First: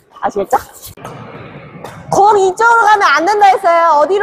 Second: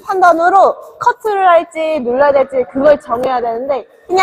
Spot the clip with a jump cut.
first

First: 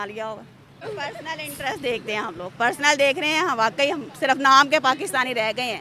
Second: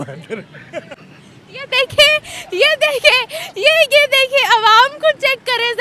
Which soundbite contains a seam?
first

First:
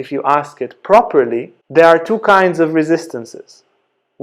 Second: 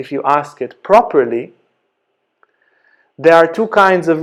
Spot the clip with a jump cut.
first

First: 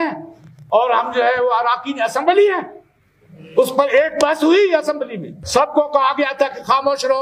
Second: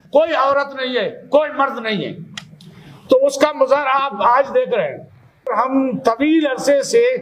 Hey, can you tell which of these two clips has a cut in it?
second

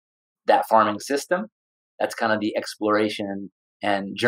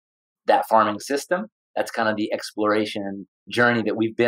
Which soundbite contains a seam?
second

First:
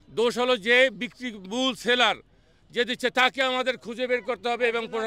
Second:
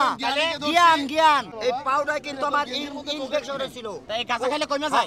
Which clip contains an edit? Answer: second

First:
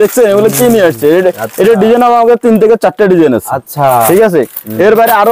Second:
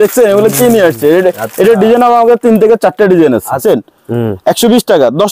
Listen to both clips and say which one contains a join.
second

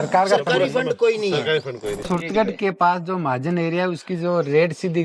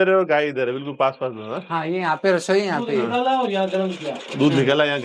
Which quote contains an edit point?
first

